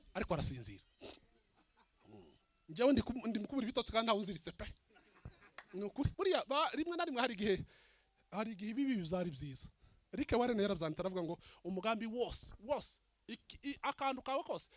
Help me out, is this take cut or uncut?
cut